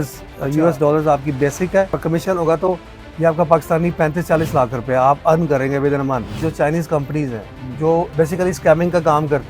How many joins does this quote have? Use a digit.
1